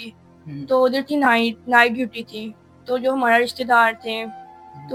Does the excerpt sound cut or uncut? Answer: uncut